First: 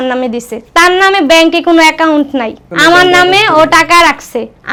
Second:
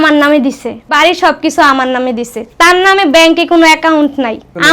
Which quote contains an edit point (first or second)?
second